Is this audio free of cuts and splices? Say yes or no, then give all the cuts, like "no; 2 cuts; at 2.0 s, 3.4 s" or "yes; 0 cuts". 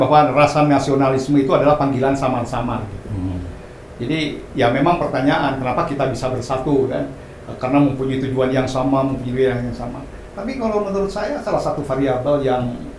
yes; 0 cuts